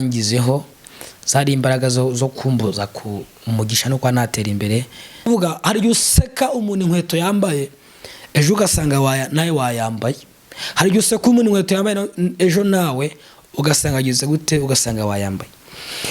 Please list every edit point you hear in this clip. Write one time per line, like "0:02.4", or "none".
0:05.3